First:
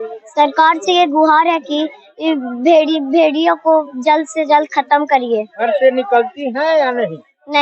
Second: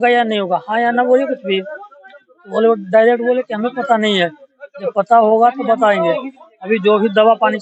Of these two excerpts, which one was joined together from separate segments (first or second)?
first